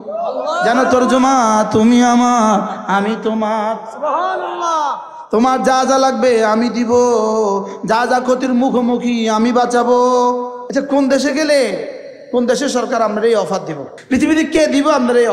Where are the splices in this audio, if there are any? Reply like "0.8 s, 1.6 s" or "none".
10.6 s